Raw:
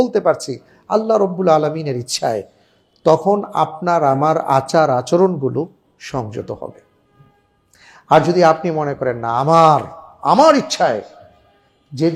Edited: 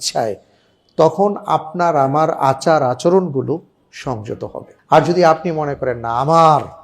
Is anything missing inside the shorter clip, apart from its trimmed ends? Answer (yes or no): yes